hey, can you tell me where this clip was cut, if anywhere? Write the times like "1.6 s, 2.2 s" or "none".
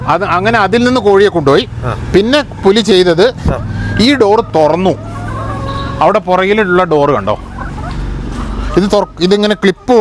none